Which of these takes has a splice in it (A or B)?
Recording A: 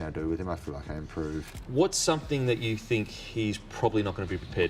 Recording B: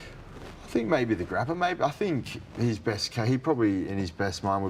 A